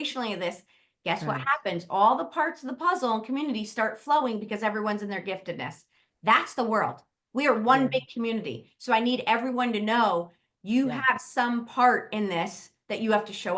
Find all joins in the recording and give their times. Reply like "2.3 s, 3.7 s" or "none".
none